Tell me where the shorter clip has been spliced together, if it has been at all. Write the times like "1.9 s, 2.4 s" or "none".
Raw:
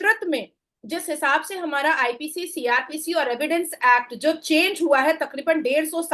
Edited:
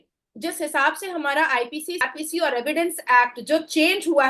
2.1 s